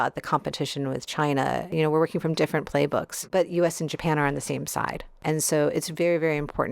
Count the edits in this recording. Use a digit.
3